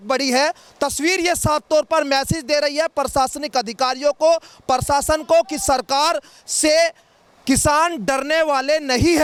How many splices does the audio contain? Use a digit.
0